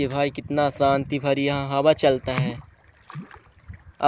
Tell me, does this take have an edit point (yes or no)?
no